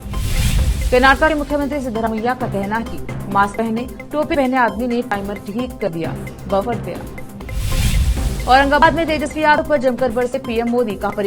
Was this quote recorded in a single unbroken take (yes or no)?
yes